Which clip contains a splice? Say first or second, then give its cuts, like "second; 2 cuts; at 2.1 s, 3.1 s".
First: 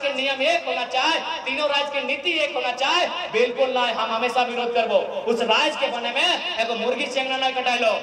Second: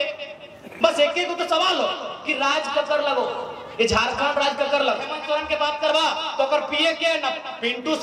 second; 1 cut; at 5.1 s